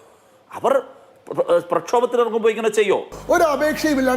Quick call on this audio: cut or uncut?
cut